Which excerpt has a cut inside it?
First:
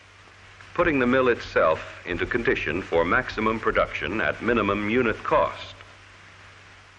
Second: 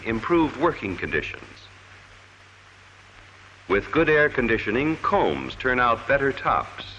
first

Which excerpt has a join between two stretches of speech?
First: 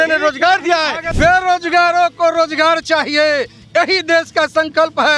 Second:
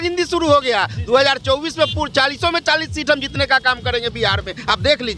first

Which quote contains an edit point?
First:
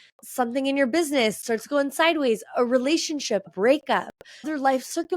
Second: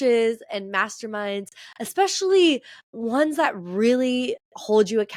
first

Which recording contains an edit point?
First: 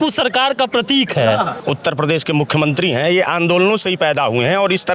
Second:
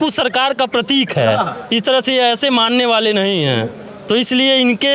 first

